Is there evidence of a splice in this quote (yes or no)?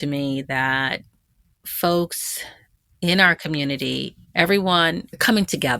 yes